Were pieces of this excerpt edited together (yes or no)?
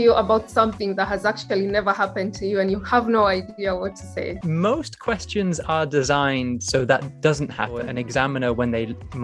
yes